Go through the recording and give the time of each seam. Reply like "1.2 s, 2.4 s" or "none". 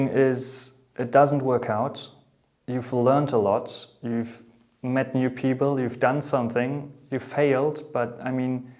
none